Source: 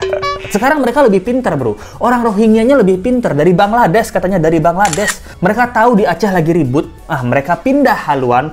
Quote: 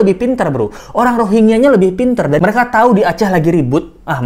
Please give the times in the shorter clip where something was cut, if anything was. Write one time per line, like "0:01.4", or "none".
0:02.4

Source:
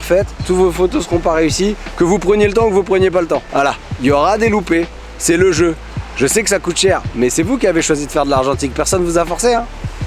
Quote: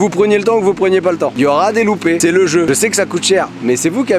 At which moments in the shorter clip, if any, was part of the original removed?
0:01.3
0:02.4

